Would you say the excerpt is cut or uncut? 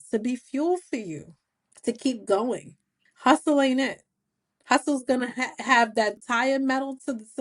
cut